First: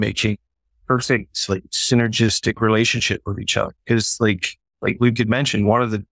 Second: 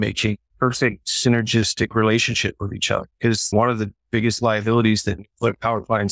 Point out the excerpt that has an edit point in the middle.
second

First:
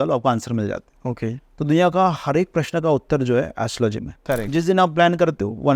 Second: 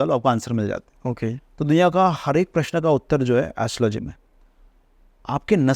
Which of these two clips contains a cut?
first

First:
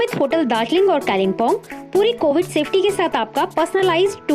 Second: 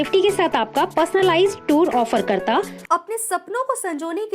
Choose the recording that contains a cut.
second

